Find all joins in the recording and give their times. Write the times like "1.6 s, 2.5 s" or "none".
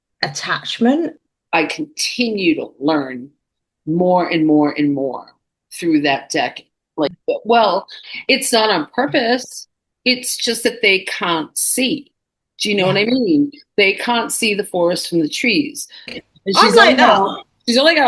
1.1 s, 7.2 s, 16.2 s